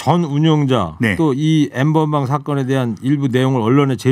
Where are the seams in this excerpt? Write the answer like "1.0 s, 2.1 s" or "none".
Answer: none